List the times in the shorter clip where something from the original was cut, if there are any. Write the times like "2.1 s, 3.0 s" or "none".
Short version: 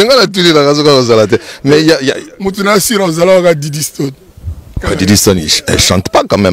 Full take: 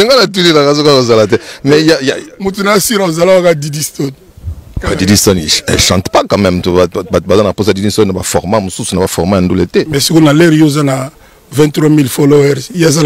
none